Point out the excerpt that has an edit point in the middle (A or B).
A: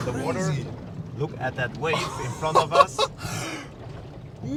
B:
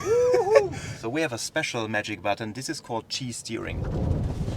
B